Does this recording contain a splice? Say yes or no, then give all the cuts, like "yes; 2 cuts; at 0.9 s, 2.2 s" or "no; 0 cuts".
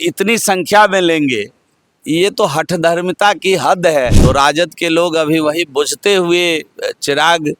yes; 1 cut; at 4.2 s